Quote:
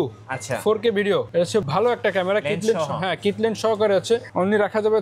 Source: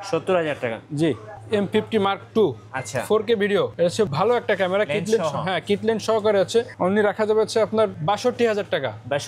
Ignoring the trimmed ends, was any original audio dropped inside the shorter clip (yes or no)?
no